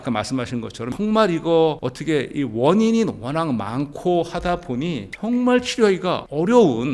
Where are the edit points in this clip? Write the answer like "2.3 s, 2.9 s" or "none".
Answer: 0.9 s